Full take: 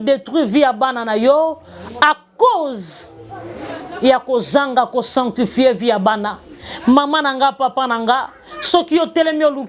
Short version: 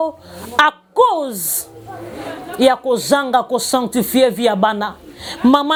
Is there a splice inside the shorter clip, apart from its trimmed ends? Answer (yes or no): no